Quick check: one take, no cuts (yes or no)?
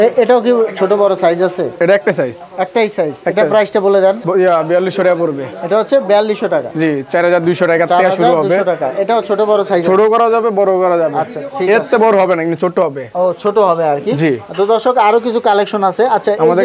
yes